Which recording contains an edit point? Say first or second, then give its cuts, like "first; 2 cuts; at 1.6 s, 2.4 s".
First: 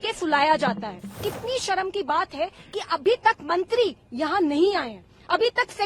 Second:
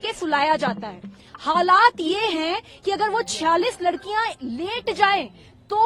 first; 1 cut; at 1.3 s